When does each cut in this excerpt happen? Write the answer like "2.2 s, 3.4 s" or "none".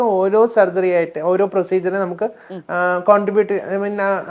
none

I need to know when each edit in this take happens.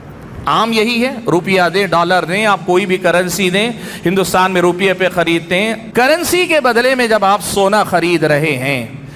5.8 s

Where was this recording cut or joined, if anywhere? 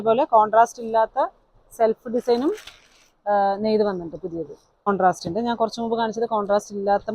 4.9 s

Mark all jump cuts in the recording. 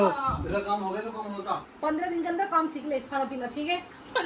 1.6 s

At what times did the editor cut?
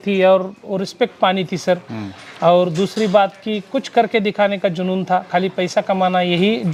none

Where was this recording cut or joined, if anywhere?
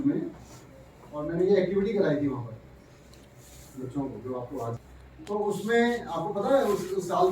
4.8 s

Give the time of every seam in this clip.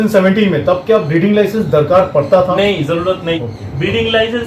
3.5 s

